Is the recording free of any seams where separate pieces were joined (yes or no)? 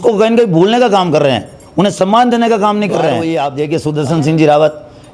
no